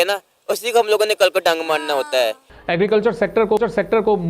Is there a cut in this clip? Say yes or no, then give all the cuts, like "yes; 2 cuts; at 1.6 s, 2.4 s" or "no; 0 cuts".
yes; 1 cut; at 2.5 s